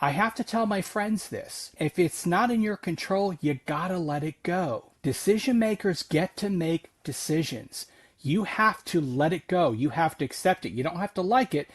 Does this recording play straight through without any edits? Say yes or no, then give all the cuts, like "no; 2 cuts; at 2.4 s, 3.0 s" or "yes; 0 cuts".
no; 2 cuts; at 1.8 s, 4.9 s